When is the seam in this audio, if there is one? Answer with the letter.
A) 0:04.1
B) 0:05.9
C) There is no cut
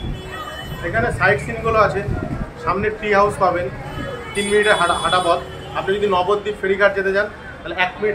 C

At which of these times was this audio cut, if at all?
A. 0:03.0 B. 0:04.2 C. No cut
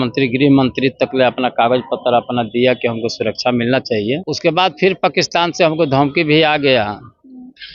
B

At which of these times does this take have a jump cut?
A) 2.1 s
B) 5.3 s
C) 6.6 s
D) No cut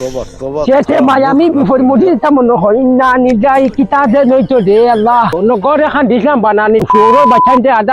B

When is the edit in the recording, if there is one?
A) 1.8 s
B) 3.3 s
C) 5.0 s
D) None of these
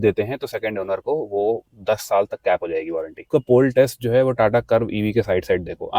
B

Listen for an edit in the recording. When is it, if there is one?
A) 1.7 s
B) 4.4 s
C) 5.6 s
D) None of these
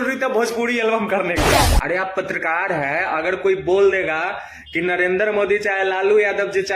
A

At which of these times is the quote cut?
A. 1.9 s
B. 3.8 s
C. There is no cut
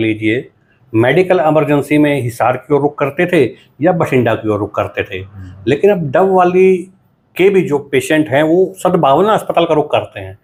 C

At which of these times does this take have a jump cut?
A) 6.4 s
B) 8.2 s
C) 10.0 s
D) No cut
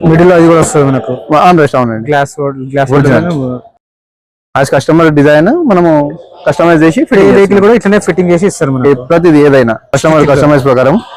C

